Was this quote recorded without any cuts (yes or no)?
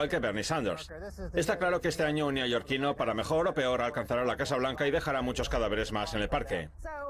no